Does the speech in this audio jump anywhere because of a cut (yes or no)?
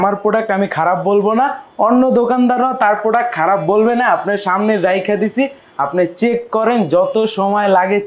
no